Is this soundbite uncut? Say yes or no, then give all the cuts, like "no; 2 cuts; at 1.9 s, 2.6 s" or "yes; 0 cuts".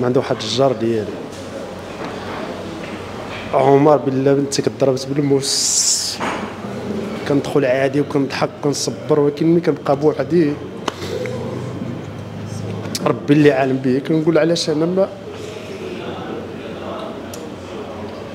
no; 1 cut; at 7.2 s